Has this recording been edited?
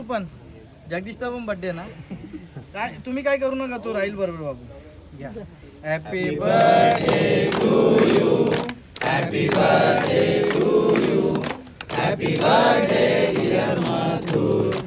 no; 0 cuts

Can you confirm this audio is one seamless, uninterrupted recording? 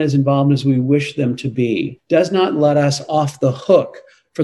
no; 1 cut; at 2.0 s

